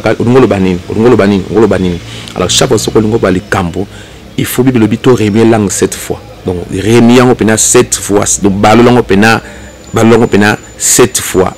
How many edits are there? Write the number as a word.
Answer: zero